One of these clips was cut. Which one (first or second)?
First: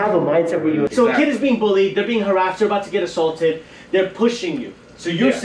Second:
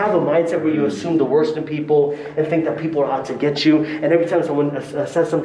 first